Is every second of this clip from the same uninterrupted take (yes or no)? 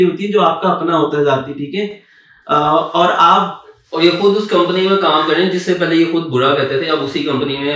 yes